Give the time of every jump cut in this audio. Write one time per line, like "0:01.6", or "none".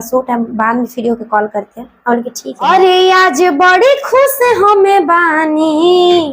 0:02.7